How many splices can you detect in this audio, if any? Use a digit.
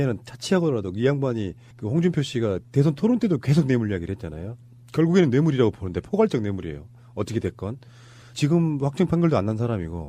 1